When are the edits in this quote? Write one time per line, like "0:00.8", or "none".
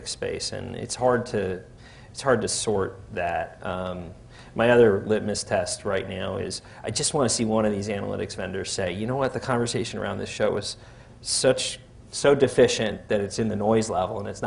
none